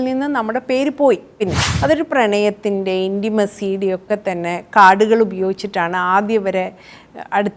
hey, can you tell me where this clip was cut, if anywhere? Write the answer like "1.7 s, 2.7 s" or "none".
1.6 s